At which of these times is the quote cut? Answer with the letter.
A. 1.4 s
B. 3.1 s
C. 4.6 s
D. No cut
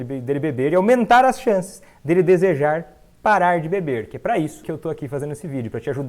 C